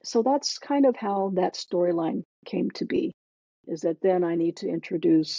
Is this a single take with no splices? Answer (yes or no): yes